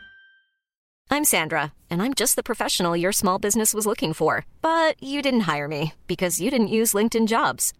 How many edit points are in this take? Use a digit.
1